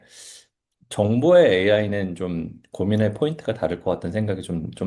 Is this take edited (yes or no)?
no